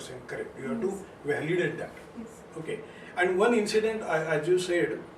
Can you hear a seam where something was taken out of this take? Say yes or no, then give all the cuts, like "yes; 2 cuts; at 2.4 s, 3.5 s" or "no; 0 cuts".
no; 0 cuts